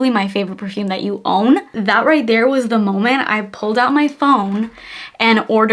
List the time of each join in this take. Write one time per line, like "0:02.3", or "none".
0:01.7